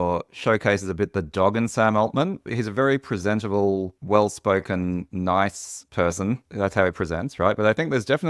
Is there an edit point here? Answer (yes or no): yes